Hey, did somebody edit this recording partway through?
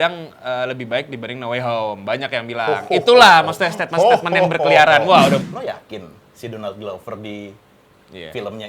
yes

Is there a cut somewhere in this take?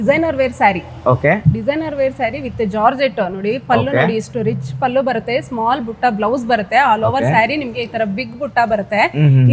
no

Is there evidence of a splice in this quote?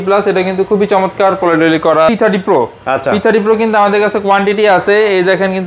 yes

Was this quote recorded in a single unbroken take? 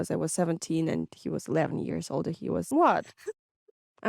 no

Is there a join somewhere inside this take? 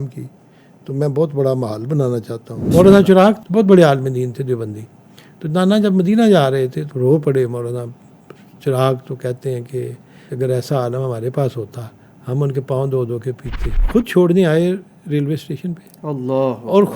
yes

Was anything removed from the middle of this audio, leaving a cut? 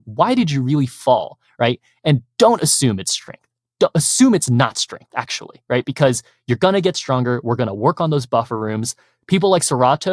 no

